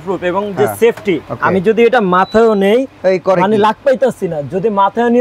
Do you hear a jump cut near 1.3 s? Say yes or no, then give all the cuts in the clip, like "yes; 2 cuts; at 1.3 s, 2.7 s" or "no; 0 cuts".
yes; 1 cut; at 1.3 s